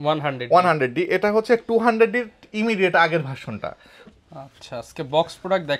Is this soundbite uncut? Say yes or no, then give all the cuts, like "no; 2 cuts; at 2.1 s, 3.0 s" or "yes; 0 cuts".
no; 1 cut; at 4.0 s